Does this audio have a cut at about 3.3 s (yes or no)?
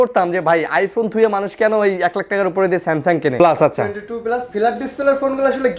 yes